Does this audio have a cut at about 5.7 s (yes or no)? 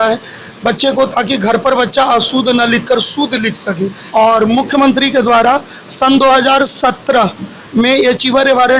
no